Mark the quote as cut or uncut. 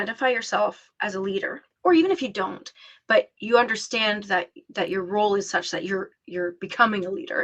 cut